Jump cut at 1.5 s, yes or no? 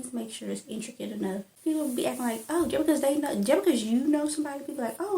yes